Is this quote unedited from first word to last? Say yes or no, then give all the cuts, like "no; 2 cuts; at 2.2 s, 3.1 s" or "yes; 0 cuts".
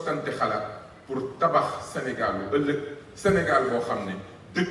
yes; 0 cuts